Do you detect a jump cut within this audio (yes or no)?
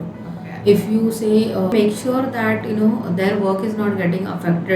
yes